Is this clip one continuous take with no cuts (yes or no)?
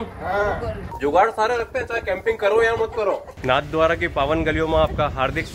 no